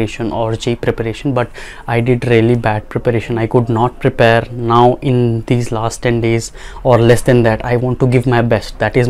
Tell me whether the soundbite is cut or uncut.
uncut